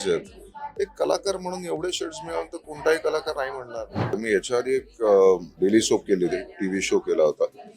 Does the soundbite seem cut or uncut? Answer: cut